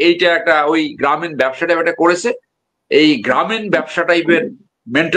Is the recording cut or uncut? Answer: uncut